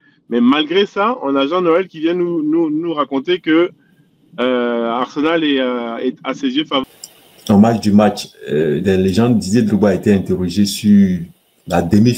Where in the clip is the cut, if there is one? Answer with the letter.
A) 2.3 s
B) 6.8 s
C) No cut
B